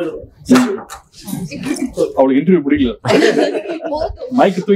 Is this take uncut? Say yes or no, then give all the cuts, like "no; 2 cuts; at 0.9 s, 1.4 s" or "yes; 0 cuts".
yes; 0 cuts